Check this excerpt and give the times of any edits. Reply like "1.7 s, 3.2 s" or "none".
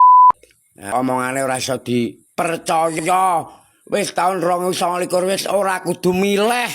0.9 s